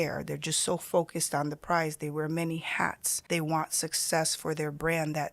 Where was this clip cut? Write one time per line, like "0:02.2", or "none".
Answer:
0:03.1